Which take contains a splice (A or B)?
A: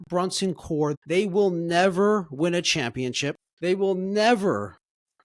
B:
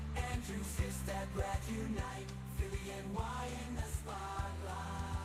A